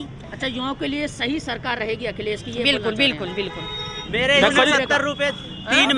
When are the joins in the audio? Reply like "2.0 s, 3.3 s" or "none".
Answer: 3.9 s